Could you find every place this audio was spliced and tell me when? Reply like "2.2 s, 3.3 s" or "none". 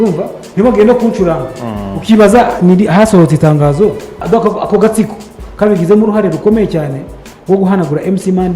4.2 s